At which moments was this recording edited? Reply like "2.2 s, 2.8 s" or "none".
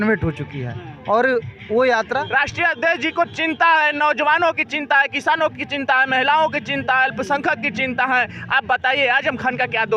2.2 s